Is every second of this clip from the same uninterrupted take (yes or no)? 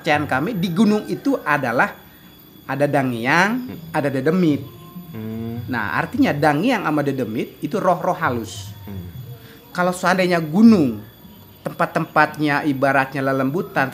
yes